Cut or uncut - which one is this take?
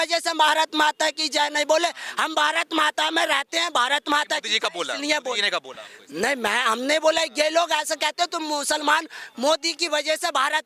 uncut